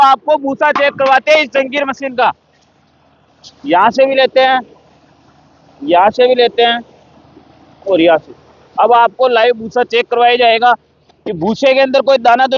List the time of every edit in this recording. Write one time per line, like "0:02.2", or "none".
none